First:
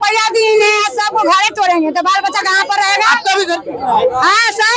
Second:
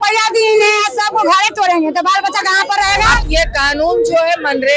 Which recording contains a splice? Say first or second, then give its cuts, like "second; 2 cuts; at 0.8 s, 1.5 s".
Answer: second; 1 cut; at 3.2 s